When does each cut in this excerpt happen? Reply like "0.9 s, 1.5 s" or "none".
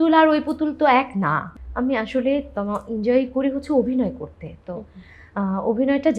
1.6 s